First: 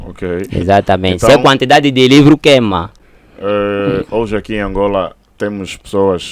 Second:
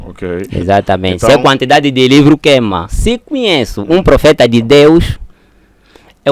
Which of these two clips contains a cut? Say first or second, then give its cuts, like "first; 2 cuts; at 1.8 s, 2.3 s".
second; 1 cut; at 2.9 s